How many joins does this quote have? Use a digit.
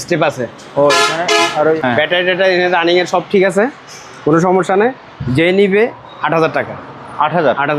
1